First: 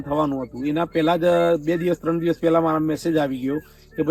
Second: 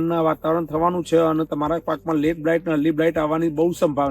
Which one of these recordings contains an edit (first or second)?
second